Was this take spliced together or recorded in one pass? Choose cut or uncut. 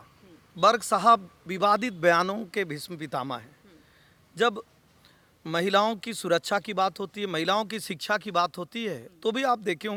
uncut